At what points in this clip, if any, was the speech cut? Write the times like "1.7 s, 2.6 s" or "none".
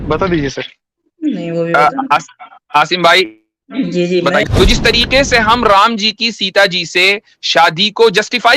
4.5 s